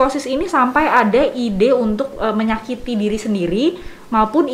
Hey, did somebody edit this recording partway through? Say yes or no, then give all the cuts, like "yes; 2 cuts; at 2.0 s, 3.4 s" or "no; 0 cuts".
no; 0 cuts